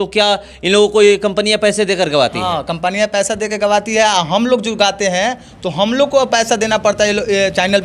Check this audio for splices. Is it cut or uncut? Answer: uncut